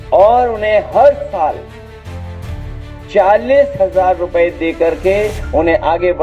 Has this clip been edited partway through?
no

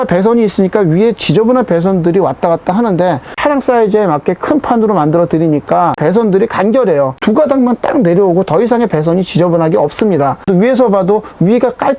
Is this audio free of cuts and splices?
no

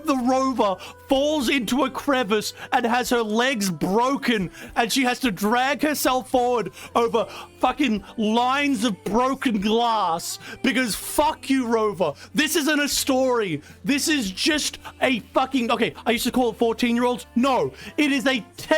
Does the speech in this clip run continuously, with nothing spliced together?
yes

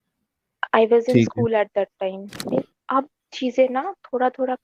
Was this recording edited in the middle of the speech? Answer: yes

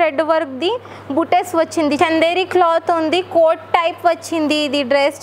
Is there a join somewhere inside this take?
yes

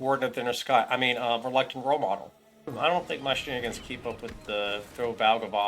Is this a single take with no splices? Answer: no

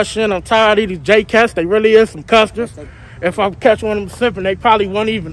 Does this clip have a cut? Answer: no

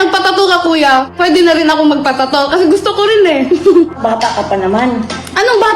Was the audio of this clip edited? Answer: yes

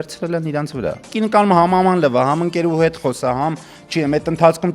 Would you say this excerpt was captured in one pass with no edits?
no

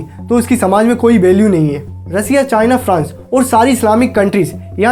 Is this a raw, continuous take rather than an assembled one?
yes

